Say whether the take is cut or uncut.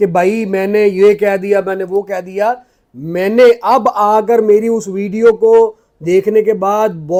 uncut